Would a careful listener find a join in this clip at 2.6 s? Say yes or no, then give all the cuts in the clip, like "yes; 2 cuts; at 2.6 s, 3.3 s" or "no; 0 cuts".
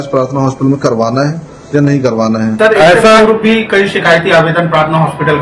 yes; 1 cut; at 2.6 s